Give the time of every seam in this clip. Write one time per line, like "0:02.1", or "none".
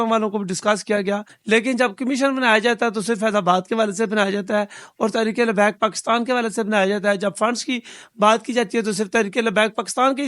0:01.3